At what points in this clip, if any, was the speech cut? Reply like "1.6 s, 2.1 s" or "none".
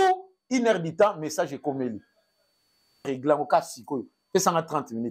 3.0 s